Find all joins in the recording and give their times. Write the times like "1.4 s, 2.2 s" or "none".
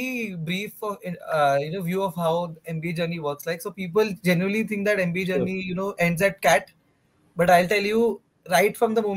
none